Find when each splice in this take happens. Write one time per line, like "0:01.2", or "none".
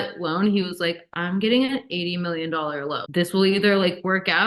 0:03.0

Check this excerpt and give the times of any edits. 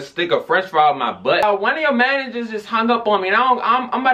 0:01.4

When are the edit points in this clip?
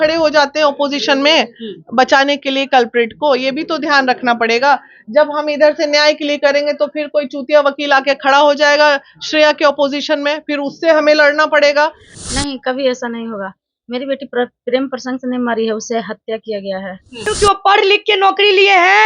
0:12.1
0:17.3

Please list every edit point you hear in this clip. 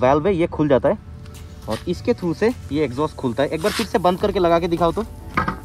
none

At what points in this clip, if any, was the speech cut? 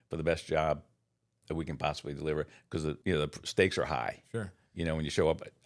0:03.0

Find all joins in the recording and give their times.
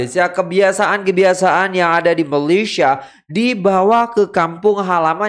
none

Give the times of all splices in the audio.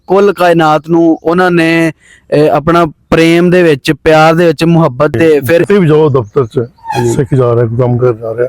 0:05.6

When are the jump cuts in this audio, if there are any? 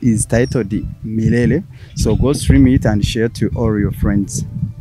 none

